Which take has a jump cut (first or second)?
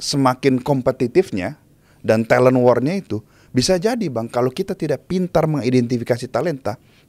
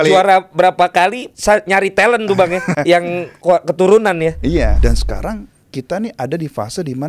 second